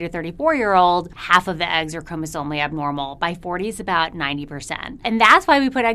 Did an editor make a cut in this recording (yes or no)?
yes